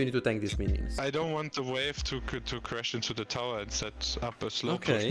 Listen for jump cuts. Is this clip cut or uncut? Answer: cut